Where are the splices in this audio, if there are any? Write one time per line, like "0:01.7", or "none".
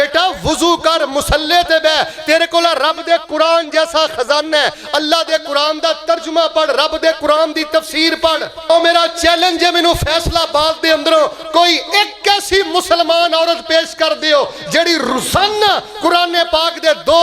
0:08.7